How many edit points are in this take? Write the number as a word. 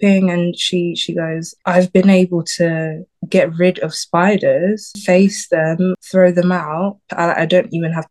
four